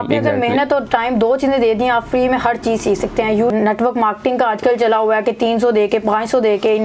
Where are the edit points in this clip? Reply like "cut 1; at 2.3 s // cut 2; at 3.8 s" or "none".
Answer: cut 1; at 3.5 s